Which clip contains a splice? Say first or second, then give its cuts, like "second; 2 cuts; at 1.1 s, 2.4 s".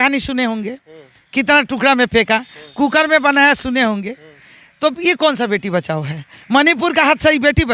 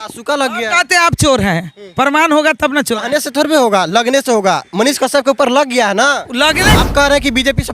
second; 1 cut; at 6.8 s